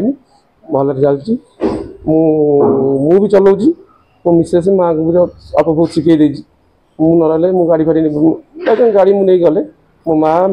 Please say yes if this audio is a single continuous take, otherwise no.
yes